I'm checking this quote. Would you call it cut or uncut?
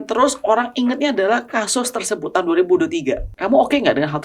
cut